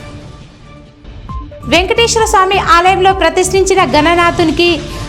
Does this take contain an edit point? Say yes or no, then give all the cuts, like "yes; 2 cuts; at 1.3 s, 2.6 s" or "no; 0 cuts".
yes; 1 cut; at 1.5 s